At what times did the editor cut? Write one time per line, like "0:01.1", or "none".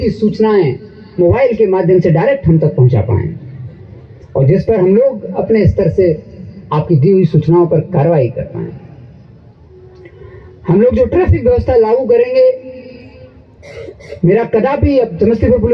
none